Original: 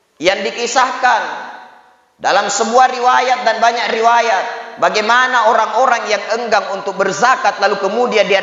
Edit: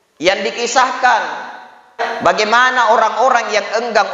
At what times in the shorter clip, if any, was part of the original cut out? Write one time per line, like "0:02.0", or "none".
0:02.0